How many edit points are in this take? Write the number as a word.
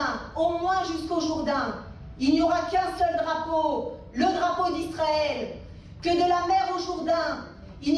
zero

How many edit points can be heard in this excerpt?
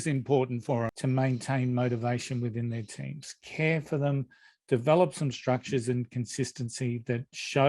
one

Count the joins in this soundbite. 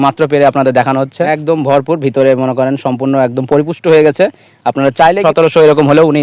two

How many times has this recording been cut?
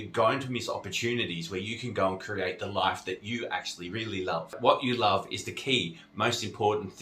one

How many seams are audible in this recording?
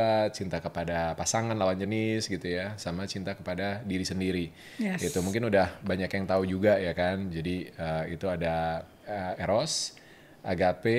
zero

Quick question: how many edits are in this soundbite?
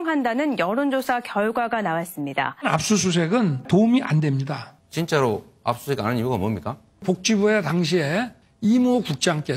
one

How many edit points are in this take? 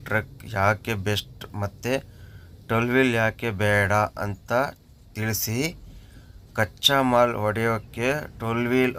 zero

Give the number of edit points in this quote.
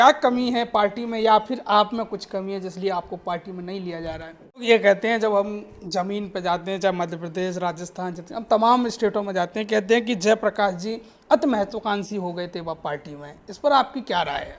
one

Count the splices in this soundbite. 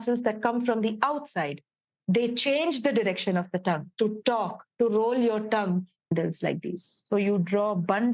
one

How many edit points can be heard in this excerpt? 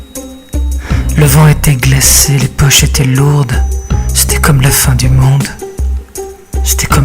one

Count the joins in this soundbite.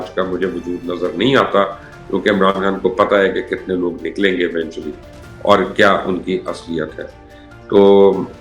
zero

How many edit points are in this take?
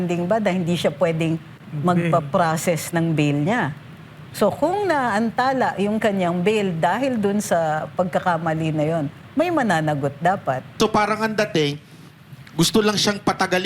one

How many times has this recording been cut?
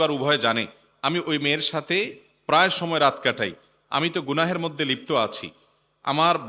zero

